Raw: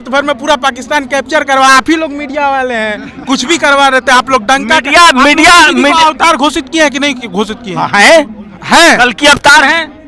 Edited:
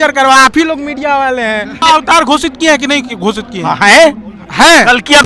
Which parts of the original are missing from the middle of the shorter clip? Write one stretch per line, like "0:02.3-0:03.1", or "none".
0:03.1-0:05.9